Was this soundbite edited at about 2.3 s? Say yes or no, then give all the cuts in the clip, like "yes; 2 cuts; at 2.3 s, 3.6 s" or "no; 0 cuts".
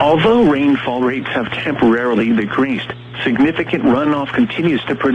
no; 0 cuts